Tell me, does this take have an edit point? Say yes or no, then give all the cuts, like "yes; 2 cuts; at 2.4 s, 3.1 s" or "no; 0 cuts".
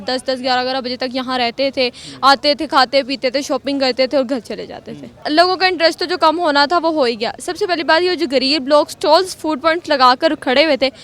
no; 0 cuts